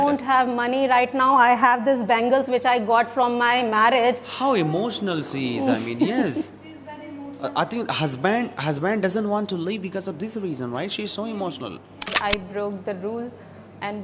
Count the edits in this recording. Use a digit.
1